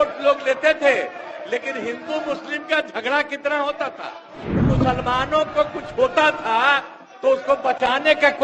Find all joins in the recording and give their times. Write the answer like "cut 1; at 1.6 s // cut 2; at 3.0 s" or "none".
cut 1; at 4.6 s